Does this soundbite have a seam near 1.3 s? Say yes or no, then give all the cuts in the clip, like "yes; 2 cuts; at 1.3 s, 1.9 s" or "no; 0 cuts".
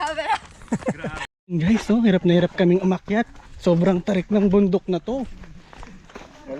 yes; 1 cut; at 1.3 s